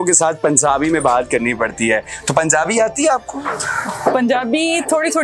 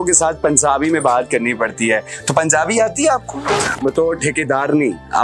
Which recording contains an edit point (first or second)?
second